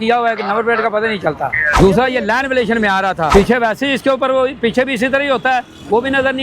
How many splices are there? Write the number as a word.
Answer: two